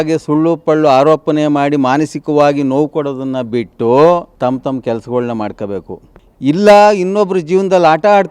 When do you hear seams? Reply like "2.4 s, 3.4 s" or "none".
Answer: 4.3 s